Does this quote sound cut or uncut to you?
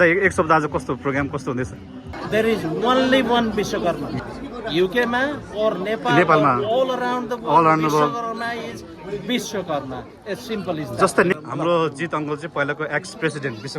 cut